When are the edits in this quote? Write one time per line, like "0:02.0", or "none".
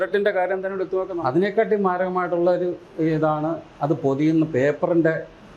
0:01.1